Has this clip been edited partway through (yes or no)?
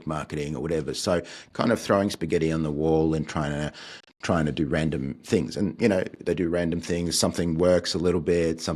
no